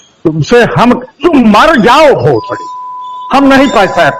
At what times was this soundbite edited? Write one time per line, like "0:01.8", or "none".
none